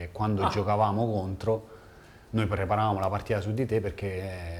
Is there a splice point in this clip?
no; 0 cuts

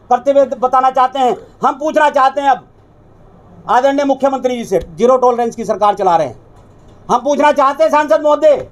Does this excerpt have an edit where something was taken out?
no; 0 cuts

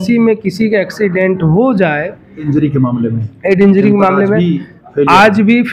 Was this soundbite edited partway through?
yes; 1 cut; at 2.4 s

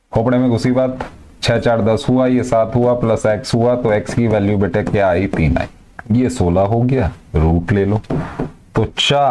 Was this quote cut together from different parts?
yes; 1 cut; at 5.8 s

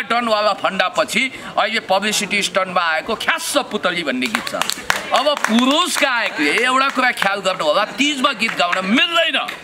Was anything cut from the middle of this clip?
no; 0 cuts

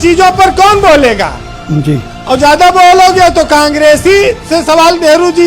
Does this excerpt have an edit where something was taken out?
no; 0 cuts

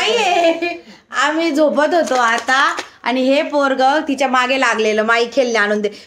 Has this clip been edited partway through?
no; 0 cuts

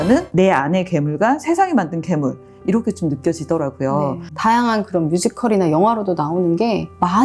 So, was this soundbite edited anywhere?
no; 0 cuts

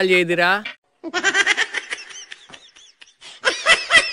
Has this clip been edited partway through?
no; 0 cuts

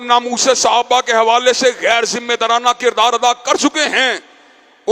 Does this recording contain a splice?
no; 0 cuts

